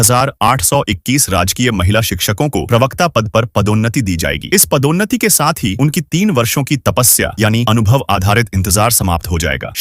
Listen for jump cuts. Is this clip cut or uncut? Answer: uncut